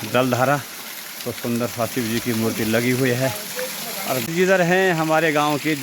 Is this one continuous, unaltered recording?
no; 1 cut; at 4.3 s

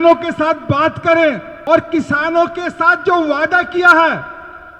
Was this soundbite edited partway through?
yes; 1 cut; at 1.5 s

